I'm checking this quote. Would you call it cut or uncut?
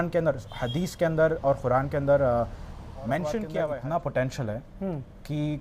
cut